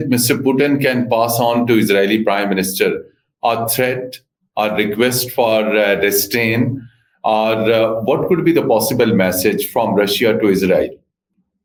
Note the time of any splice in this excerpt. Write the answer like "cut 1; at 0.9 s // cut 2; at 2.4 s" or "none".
none